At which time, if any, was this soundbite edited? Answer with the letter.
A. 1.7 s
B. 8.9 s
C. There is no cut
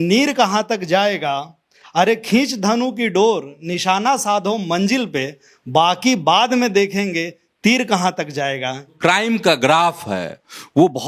B